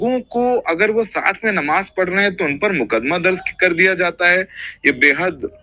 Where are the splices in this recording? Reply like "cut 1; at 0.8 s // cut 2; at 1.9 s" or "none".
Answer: none